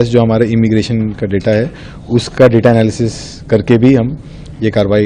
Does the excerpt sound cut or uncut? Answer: uncut